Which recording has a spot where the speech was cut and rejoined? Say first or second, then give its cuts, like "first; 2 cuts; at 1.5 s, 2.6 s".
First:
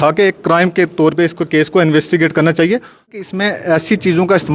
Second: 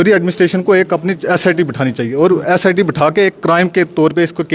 first; 1 cut; at 3.3 s